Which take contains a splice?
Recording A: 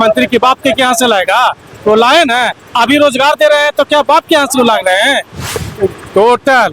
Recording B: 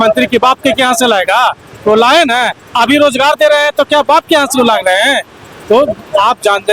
A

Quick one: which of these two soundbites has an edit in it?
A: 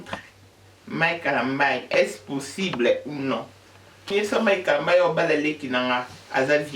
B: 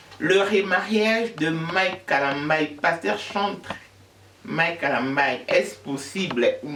A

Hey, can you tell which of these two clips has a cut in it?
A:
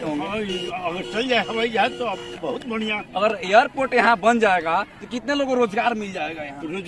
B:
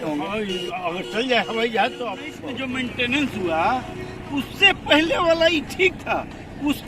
B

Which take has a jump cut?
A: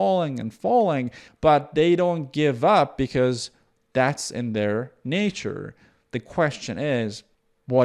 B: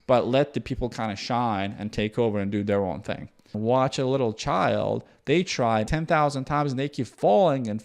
B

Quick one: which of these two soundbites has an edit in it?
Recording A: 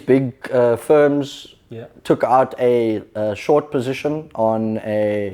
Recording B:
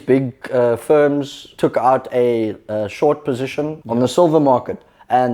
B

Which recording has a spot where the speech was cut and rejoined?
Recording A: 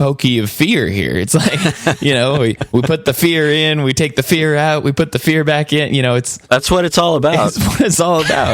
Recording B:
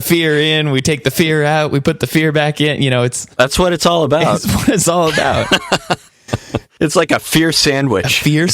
B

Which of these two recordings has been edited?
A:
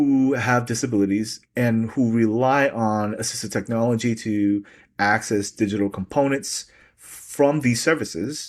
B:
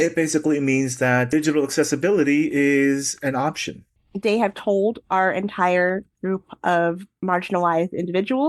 B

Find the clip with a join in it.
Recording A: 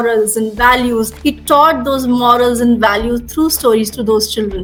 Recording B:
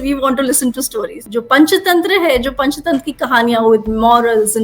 B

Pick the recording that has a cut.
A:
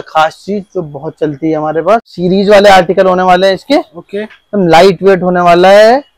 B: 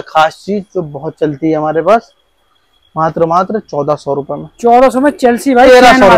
A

